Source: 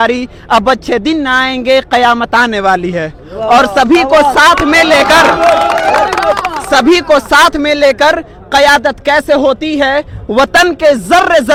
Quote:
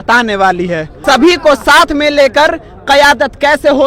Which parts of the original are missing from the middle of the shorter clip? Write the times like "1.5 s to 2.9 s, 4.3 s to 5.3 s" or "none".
3.2 s to 6.6 s